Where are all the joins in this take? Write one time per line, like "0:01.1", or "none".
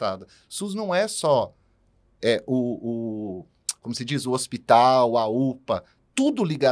none